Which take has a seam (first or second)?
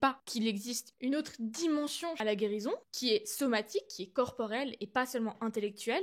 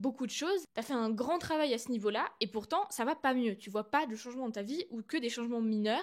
first